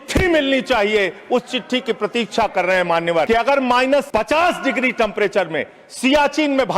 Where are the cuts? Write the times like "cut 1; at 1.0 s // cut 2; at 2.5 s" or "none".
cut 1; at 3.3 s // cut 2; at 4.1 s

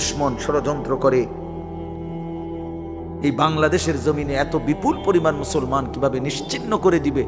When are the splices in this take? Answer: cut 1; at 1.3 s // cut 2; at 3.0 s

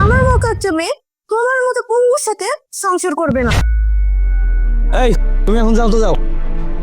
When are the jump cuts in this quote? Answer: cut 1; at 3.7 s

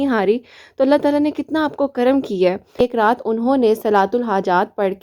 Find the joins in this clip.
cut 1; at 2.8 s

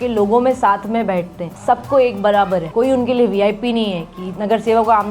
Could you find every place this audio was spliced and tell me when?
cut 1; at 1.4 s // cut 2; at 2.7 s

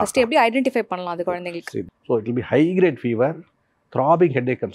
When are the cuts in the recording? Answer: cut 1; at 1.8 s

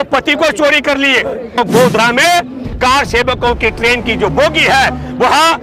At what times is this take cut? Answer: cut 1; at 1.6 s

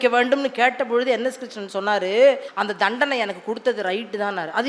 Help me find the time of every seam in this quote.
cut 1; at 2.5 s

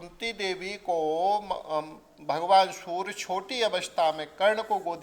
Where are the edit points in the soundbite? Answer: none

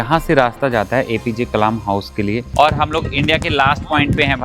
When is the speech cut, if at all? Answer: cut 1; at 2.5 s

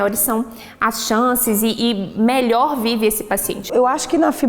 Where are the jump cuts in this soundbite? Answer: cut 1; at 3.5 s

